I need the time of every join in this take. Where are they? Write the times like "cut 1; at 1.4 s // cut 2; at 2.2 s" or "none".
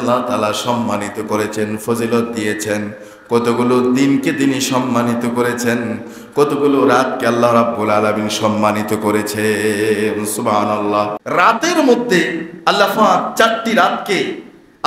cut 1; at 11.2 s